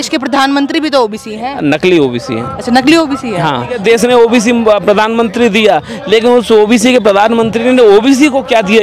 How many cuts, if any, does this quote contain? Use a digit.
1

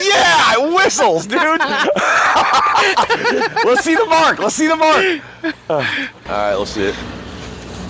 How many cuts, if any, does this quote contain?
1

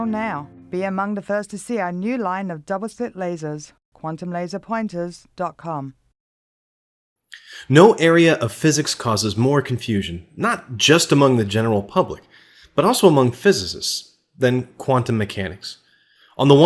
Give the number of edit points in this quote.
0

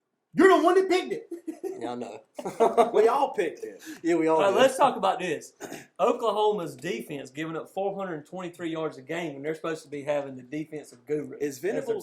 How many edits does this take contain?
0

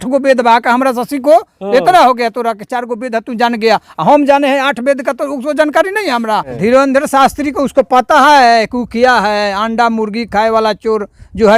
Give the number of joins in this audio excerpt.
1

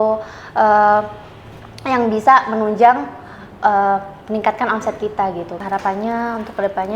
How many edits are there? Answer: 1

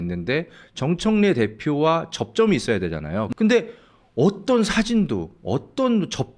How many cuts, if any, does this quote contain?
1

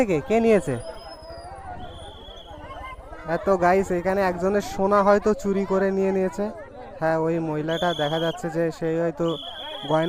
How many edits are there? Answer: 0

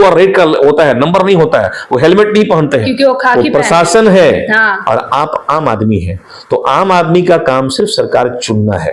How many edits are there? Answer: 1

